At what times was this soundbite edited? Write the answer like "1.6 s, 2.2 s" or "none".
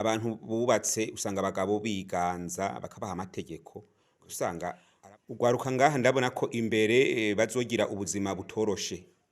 4.9 s